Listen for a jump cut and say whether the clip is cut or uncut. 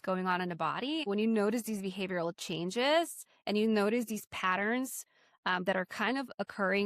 cut